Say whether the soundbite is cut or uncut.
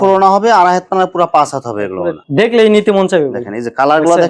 uncut